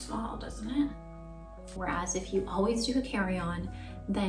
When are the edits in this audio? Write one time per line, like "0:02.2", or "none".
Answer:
0:01.8